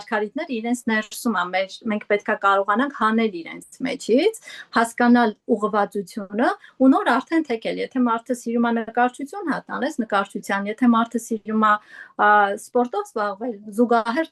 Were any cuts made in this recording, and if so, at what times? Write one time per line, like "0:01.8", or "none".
none